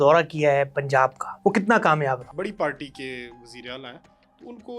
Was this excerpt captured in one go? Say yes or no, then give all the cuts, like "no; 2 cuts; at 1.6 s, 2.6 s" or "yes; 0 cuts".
no; 2 cuts; at 1.2 s, 2.3 s